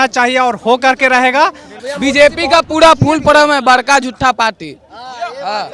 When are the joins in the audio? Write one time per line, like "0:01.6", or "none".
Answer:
0:01.8